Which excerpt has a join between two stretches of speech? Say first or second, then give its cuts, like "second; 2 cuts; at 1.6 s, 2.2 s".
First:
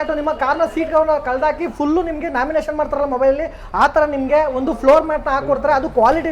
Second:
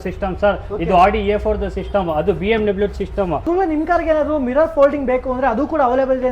second; 1 cut; at 3.4 s